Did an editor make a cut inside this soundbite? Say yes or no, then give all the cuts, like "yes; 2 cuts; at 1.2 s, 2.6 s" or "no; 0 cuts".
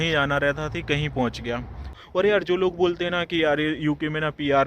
yes; 1 cut; at 1.9 s